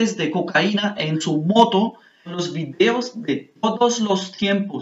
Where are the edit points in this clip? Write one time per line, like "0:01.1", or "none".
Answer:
0:02.3